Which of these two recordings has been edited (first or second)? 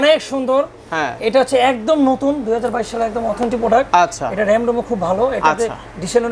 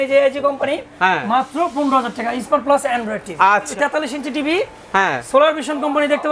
second